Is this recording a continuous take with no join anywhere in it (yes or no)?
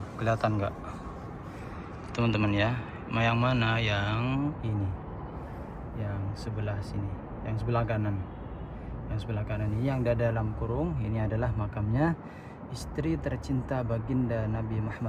yes